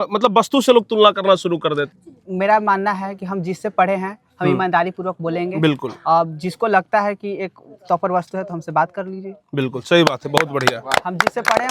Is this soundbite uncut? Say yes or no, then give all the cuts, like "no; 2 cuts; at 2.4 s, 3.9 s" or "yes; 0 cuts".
no; 1 cut; at 1.9 s